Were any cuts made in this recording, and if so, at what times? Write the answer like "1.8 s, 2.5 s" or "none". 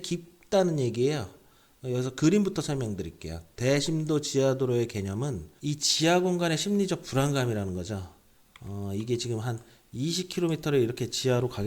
5.4 s